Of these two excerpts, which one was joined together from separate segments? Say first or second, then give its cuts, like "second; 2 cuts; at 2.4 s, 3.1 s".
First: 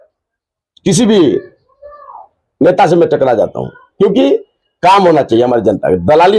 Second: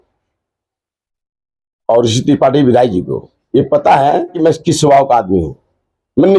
second; 1 cut; at 4.4 s